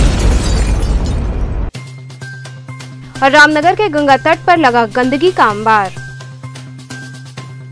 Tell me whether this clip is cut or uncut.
uncut